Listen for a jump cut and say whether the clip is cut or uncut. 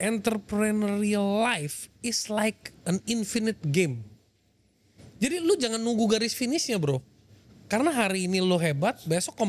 uncut